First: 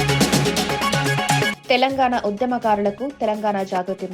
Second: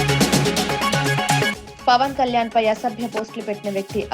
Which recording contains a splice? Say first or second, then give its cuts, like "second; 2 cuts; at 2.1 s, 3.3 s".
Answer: second; 1 cut; at 1.6 s